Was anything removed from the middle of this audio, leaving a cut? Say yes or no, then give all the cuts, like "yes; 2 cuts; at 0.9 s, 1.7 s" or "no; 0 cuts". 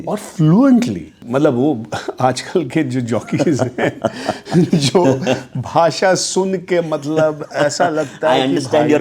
yes; 1 cut; at 1.1 s